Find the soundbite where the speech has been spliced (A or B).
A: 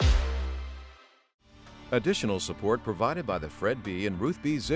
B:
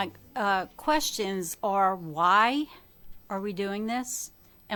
A